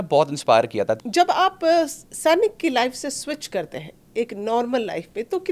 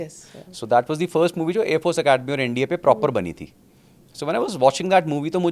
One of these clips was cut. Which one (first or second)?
first